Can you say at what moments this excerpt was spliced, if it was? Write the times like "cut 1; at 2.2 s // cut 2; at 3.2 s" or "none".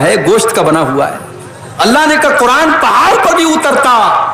none